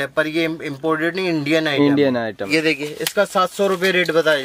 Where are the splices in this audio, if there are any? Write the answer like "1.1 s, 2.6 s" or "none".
2.4 s